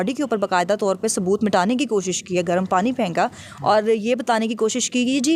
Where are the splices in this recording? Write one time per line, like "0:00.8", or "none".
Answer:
none